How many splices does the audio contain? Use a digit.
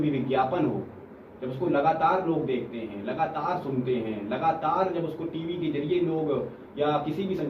0